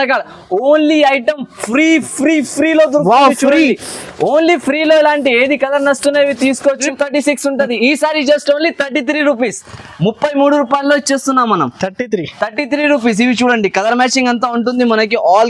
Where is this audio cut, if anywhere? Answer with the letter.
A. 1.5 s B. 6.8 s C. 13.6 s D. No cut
B